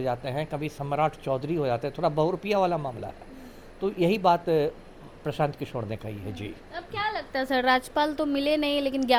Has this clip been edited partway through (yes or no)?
no